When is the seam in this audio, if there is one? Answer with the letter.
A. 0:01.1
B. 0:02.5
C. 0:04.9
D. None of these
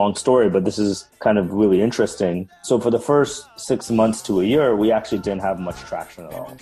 D